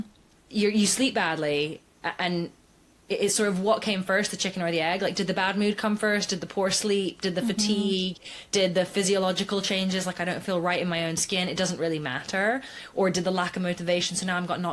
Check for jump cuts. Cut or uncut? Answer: uncut